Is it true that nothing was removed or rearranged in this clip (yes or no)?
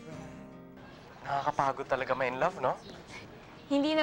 no